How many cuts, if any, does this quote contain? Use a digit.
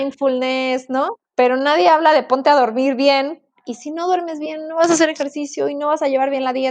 1